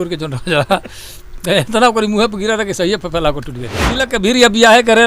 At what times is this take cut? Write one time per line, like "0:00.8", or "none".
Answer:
0:04.0